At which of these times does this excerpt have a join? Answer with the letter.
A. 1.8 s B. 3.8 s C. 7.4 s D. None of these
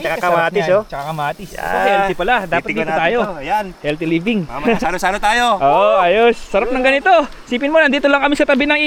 D